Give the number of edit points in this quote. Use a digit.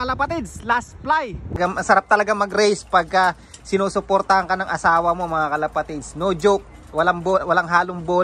1